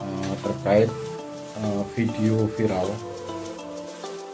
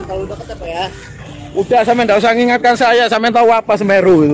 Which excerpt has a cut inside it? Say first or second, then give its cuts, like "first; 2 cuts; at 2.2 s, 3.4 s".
first; 1 cut; at 3.0 s